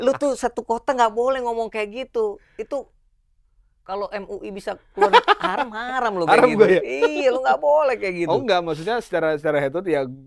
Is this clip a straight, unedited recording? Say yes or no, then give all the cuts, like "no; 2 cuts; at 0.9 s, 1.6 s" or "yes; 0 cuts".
yes; 0 cuts